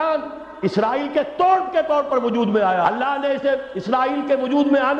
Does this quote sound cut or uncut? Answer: cut